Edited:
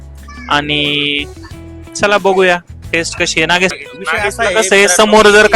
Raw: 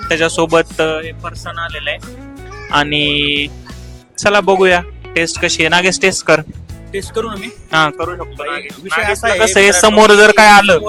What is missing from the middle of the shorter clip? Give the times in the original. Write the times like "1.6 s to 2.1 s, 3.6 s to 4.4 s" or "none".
6.0 s to 8.6 s